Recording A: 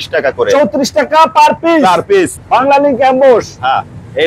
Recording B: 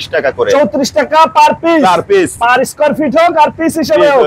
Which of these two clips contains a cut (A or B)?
A